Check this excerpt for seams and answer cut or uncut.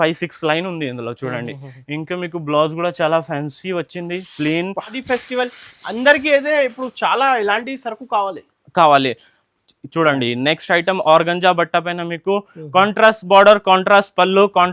cut